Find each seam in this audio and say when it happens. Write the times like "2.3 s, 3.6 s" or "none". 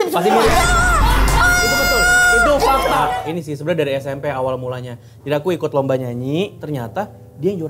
3.1 s, 6.6 s

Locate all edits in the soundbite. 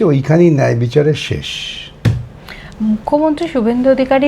none

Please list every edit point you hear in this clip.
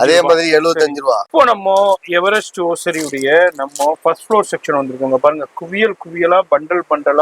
1.2 s

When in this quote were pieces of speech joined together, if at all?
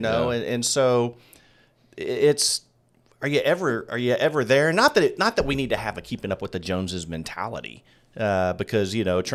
none

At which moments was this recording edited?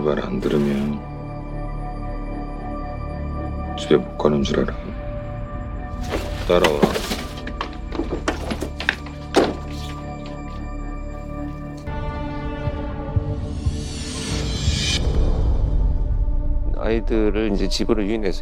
none

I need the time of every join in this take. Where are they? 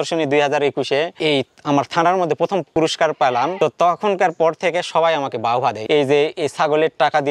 5.8 s

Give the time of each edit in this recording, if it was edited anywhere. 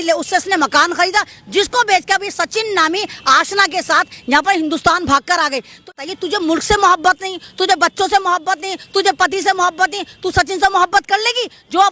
5.9 s

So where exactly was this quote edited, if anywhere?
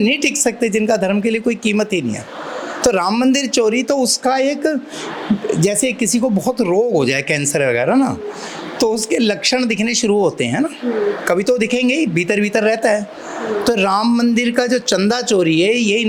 none

